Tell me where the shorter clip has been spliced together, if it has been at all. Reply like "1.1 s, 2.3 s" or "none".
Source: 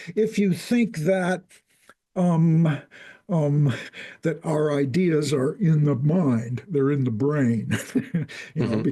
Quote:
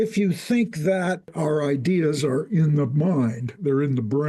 1.3 s